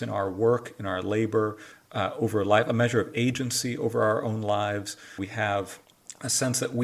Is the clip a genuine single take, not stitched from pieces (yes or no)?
no